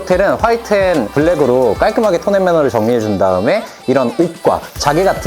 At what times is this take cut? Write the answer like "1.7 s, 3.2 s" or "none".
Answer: none